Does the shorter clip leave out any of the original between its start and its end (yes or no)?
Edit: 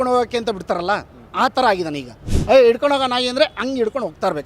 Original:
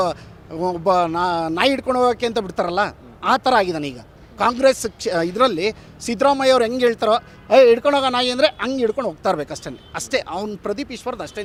yes